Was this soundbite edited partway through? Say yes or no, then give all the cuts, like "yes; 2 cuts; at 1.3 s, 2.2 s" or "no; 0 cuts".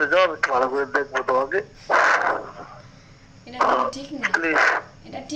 yes; 1 cut; at 1.7 s